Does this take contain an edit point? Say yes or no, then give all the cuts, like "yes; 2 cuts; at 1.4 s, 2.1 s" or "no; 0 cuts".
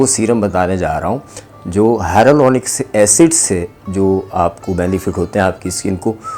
no; 0 cuts